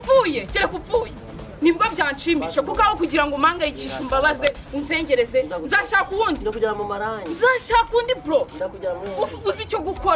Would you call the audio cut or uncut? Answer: cut